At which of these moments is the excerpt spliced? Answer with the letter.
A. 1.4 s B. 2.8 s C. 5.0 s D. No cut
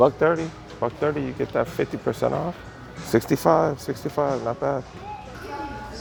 D